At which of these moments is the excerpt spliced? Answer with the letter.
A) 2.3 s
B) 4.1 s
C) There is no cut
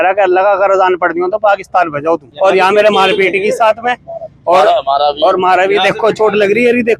A